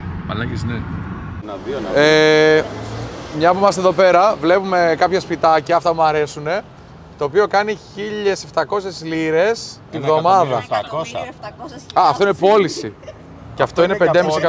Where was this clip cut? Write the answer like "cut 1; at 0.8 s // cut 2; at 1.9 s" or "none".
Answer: cut 1; at 1.4 s